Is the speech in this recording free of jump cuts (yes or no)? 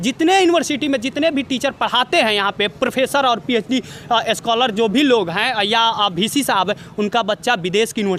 yes